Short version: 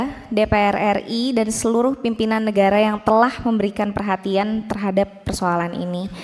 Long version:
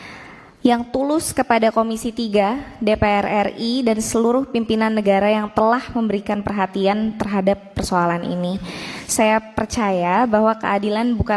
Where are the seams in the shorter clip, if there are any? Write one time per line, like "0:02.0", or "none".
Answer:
none

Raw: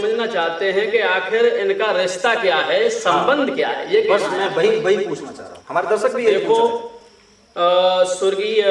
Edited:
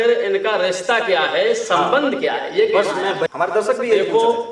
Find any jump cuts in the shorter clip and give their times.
0:03.2

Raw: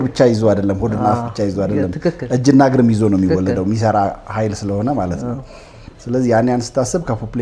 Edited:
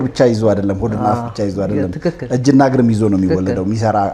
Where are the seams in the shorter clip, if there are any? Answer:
none

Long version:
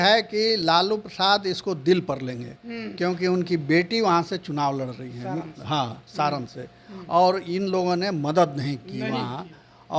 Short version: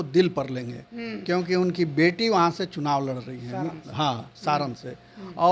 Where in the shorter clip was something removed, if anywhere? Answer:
none

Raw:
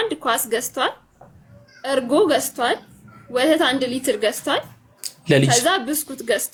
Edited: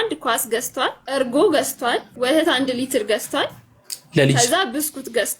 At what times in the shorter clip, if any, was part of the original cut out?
0:01.0
0:02.1

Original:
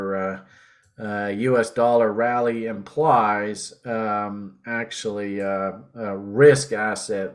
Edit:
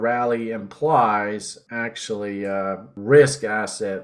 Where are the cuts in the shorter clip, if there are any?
0:01.6
0:02.9

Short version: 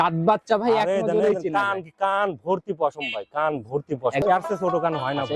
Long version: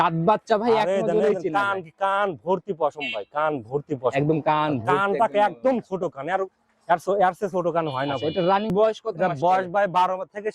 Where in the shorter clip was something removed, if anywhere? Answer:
0:04.2

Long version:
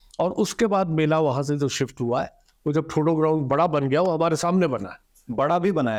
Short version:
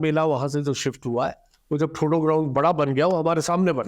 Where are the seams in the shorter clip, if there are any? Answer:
none

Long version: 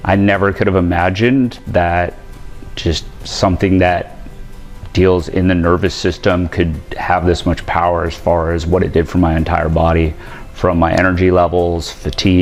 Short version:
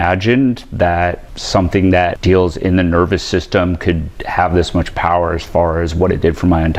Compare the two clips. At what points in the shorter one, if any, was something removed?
0:01.3
0:02.2

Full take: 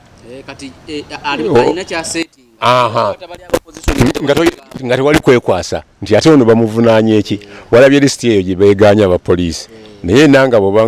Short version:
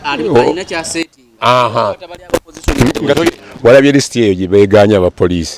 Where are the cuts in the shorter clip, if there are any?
0:03.5

